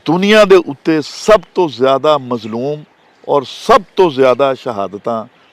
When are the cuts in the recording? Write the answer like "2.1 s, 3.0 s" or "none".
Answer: none